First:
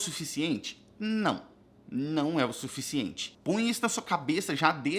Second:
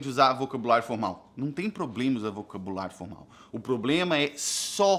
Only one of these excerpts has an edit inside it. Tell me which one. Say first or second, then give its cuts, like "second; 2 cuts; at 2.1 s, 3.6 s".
first; 1 cut; at 3.3 s